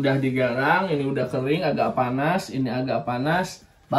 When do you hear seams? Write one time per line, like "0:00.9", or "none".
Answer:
none